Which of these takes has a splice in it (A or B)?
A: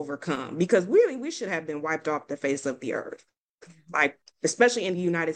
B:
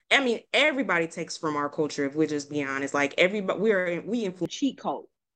B